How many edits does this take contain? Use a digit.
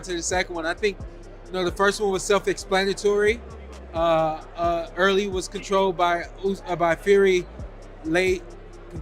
0